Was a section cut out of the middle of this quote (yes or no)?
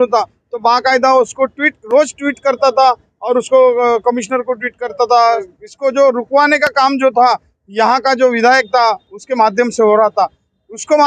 yes